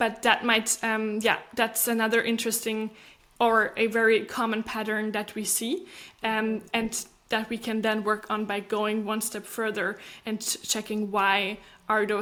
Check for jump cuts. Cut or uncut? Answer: uncut